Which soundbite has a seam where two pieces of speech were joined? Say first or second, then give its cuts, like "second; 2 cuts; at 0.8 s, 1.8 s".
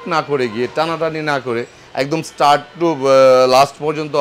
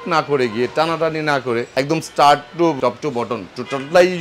second; 2 cuts; at 1.7 s, 2.8 s